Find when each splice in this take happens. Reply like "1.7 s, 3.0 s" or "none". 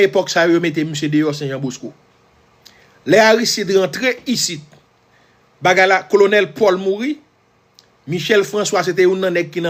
none